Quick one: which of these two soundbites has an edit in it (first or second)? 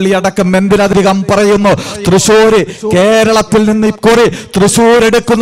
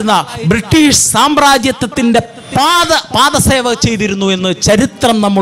first